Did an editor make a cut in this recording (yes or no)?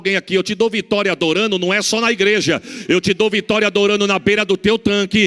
no